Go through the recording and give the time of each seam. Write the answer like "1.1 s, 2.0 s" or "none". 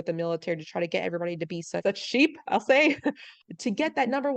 1.8 s, 3.4 s